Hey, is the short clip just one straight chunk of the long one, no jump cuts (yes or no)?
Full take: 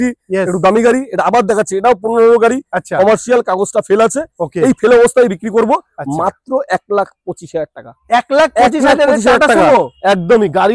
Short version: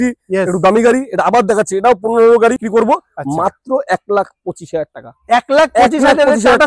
no